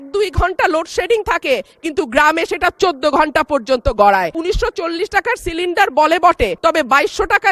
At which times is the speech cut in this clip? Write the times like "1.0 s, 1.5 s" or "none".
4.4 s, 6.6 s